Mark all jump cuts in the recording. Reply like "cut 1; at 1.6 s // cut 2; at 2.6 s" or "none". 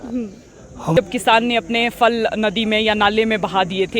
cut 1; at 0.9 s

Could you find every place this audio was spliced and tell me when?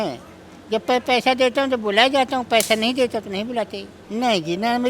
cut 1; at 4.0 s

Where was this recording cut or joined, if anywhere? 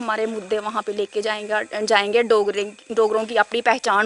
none

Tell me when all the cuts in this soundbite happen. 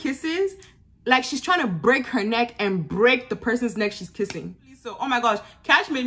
cut 1; at 5.0 s

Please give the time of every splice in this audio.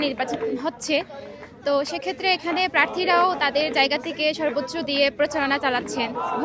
none

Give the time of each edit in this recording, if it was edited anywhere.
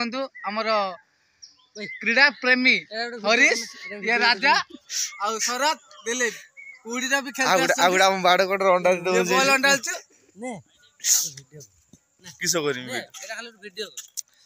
none

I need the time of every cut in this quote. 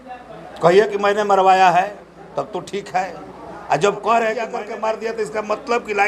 cut 1; at 4.5 s

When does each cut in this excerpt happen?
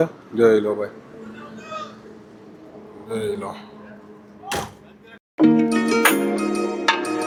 none

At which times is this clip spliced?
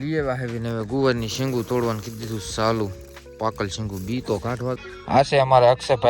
cut 1; at 4.8 s

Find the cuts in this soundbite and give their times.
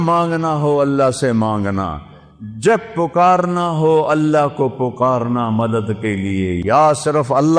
cut 1; at 6.6 s

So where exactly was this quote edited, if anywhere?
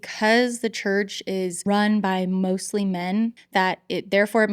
cut 1; at 1.6 s // cut 2; at 3.4 s

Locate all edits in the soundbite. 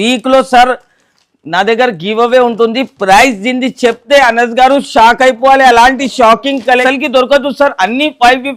cut 1; at 6.8 s

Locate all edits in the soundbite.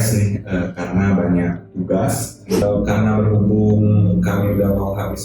cut 1; at 2.6 s

